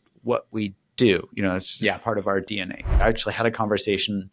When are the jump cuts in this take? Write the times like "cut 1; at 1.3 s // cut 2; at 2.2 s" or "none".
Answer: cut 1; at 3.0 s